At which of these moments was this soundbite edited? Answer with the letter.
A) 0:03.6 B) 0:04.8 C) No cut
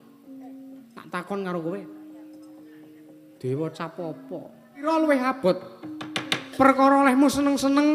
B